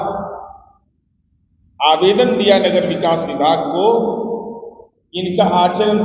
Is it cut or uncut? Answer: uncut